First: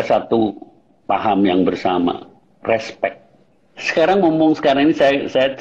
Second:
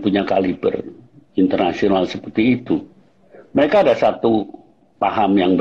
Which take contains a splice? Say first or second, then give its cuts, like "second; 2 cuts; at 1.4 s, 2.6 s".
first; 1 cut; at 3.2 s